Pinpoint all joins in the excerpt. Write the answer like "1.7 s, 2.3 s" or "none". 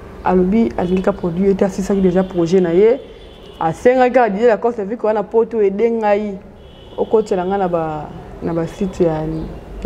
none